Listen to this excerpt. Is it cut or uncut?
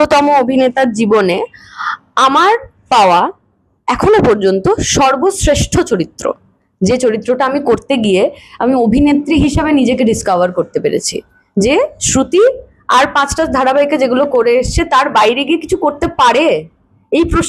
uncut